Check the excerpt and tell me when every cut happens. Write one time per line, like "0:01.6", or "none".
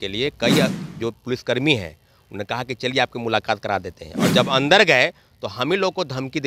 none